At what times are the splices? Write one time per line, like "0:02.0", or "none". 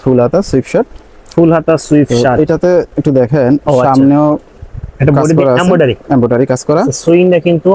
none